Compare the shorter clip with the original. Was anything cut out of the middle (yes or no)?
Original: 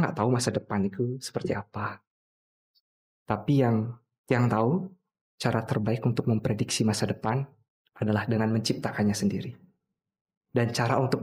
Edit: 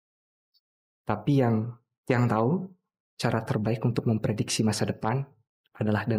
no